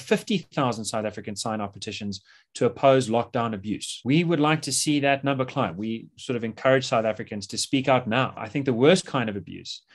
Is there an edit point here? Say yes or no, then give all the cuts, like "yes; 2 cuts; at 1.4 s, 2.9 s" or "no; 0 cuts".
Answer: no; 0 cuts